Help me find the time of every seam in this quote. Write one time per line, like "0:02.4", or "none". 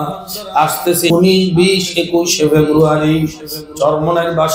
0:01.1